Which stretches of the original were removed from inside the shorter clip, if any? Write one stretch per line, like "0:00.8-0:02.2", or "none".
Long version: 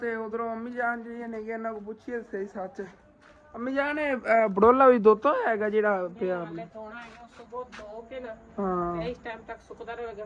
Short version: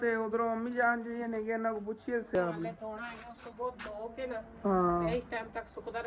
0:02.3-0:06.3